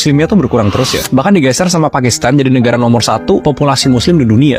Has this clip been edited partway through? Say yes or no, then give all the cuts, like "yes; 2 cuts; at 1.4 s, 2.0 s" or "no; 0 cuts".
no; 0 cuts